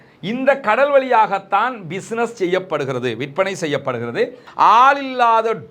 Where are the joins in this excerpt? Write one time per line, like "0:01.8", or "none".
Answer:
0:04.4